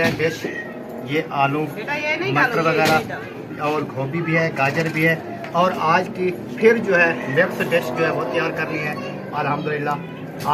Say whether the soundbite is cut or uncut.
uncut